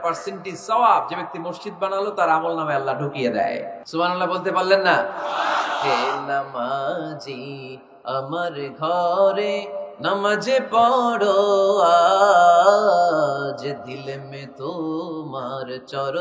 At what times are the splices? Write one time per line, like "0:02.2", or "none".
0:03.8